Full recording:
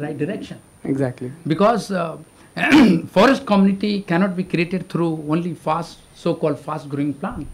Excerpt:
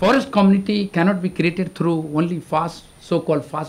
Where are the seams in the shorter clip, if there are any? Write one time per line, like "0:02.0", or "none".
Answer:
none